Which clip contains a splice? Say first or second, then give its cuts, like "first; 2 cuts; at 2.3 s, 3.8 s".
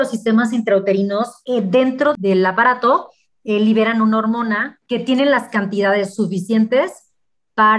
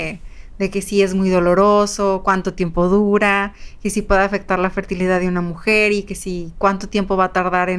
first; 3 cuts; at 1.4 s, 2.1 s, 4.7 s